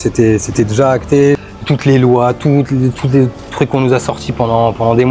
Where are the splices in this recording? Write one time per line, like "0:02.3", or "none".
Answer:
0:01.5